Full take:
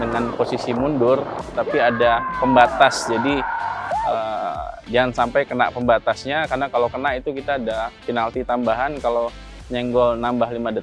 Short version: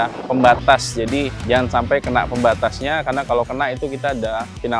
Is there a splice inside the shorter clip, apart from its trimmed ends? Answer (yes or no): yes